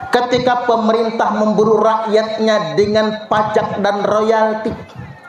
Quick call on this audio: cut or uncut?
uncut